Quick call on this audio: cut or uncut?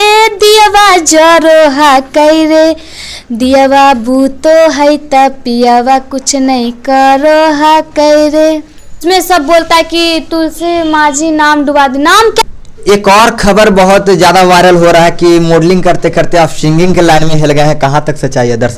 cut